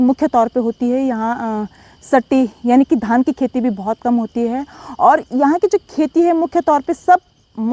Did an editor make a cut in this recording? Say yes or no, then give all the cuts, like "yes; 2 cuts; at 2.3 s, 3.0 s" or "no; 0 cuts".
no; 0 cuts